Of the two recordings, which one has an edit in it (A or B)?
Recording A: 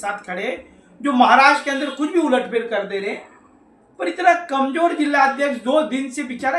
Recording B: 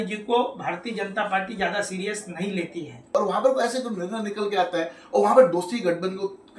B